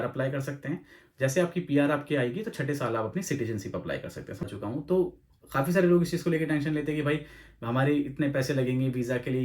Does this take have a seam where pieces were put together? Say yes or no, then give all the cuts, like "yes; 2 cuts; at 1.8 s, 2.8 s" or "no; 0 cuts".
yes; 1 cut; at 4.4 s